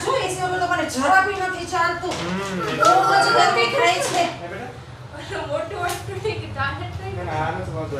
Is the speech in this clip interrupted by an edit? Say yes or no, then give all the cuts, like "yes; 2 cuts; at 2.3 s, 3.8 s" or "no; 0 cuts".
no; 0 cuts